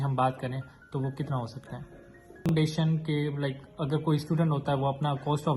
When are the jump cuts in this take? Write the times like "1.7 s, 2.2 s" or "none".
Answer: 2.5 s

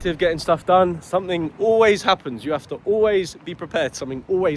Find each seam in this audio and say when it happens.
none

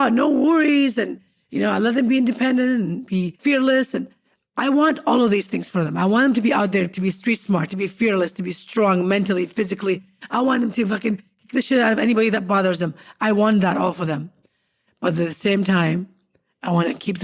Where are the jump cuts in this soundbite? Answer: 3.3 s

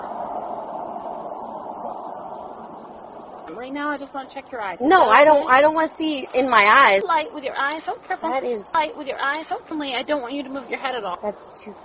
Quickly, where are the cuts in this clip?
3.5 s, 7.0 s, 9.7 s, 11.1 s

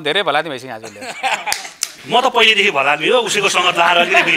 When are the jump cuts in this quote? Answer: none

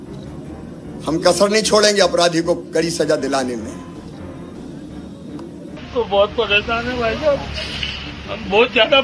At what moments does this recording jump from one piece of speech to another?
5.8 s

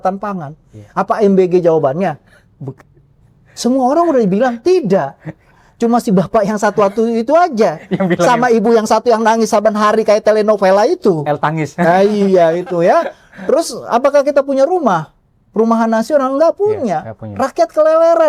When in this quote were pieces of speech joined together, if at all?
none

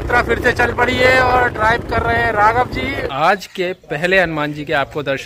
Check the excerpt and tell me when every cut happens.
3.1 s

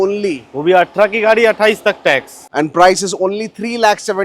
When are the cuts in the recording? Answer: 2.4 s

